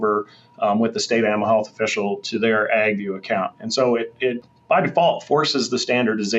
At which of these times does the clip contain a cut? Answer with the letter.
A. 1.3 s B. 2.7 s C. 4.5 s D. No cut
C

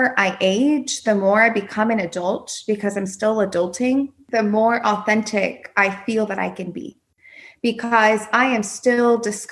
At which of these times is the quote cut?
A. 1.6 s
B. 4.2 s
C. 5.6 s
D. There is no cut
B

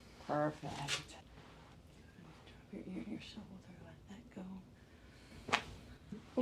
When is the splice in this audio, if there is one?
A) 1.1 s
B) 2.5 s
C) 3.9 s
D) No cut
A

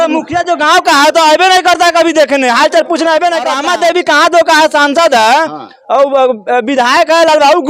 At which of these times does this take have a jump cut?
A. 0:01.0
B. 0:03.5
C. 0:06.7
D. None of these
B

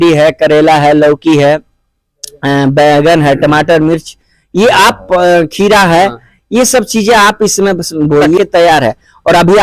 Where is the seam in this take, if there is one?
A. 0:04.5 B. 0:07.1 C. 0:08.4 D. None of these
C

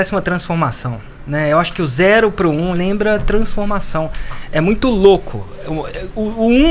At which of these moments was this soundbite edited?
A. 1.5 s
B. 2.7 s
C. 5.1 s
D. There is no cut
B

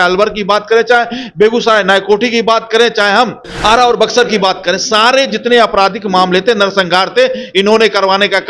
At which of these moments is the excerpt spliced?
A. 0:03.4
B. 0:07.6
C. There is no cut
A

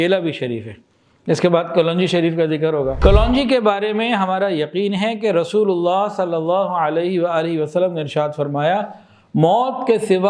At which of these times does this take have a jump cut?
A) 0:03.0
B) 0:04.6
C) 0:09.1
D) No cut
A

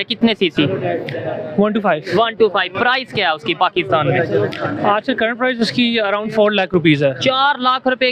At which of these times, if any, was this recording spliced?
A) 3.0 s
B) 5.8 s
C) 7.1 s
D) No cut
D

